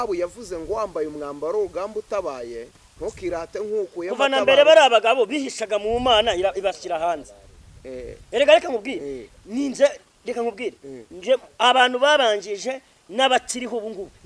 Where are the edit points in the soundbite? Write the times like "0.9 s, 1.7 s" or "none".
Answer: none